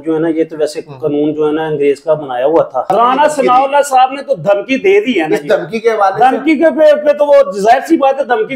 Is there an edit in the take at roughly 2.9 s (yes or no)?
yes